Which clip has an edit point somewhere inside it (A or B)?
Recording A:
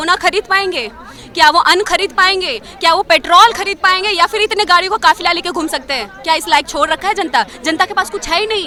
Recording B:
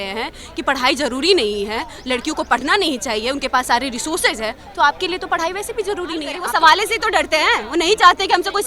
B